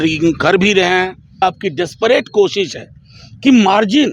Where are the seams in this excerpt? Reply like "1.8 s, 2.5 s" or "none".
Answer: 1.4 s